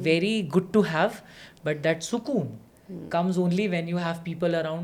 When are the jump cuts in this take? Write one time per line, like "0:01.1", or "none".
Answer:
none